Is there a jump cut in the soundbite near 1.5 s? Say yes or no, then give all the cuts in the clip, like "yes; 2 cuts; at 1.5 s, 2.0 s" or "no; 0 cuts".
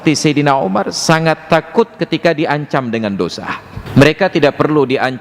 no; 1 cut; at 3.7 s